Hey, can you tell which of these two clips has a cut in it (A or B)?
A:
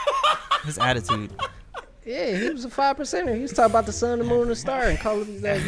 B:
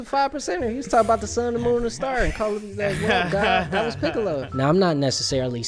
B